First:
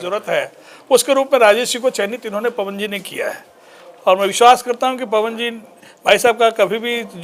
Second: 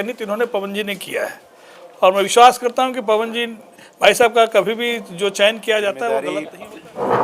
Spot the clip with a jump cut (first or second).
second